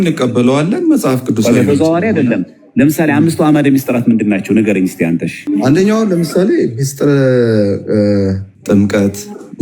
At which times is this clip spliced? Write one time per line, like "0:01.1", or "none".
0:05.4
0:08.5